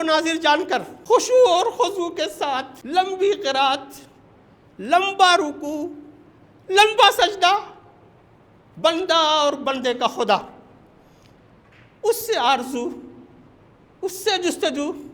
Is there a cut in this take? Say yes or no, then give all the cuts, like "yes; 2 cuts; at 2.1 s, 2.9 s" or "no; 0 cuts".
yes; 2 cuts; at 0.9 s, 2.7 s